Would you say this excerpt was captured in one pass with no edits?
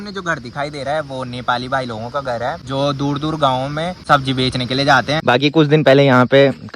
no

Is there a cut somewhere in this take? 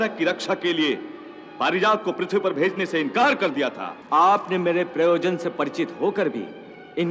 yes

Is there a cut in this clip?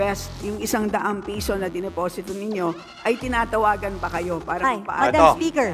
no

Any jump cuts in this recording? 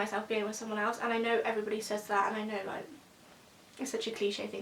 no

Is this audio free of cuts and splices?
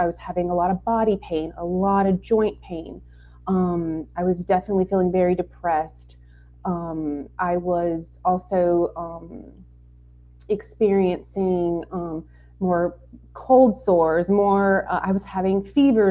yes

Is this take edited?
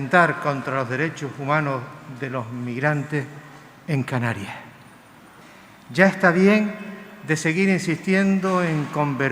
yes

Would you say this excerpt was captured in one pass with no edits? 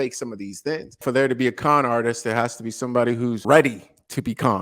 no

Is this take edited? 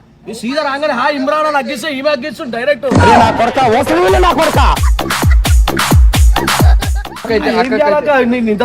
yes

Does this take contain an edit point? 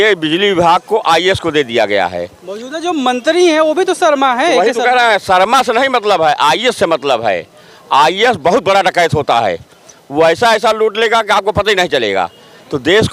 no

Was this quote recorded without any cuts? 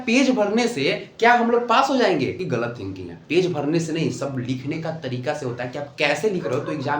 no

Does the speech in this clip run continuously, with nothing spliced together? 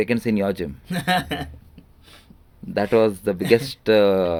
yes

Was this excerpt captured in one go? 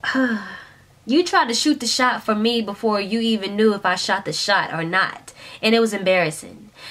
yes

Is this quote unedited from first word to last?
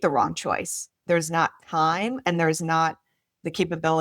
no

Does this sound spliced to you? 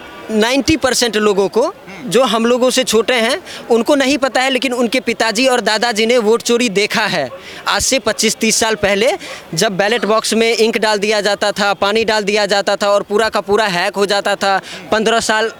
no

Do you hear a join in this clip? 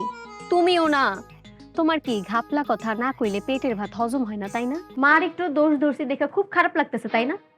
yes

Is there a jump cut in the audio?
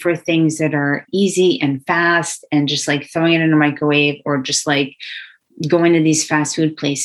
no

